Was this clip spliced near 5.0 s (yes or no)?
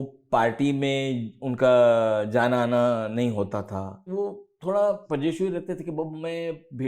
yes